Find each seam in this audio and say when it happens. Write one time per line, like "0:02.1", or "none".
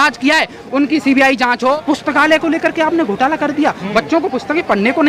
0:01.7